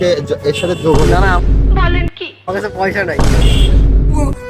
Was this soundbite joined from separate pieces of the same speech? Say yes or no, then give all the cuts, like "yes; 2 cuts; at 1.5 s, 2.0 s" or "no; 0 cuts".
yes; 1 cut; at 2.5 s